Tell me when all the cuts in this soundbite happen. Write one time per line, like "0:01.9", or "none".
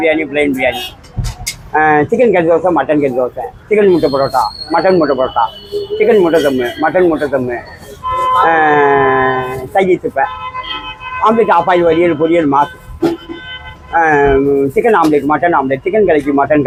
none